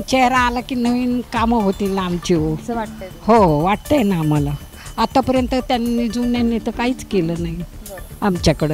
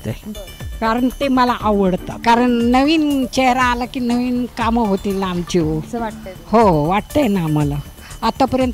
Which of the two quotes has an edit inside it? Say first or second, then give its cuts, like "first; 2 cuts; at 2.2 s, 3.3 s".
second; 1 cut; at 2.1 s